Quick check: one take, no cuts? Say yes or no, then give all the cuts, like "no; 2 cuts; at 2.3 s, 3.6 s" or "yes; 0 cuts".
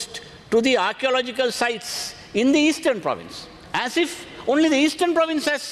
yes; 0 cuts